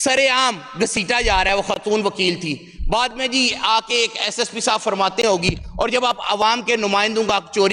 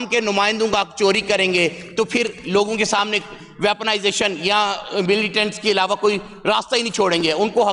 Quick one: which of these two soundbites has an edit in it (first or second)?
first